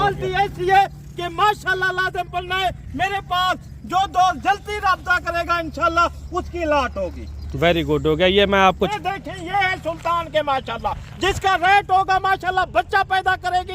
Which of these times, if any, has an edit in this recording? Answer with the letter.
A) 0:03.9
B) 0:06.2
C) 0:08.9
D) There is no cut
C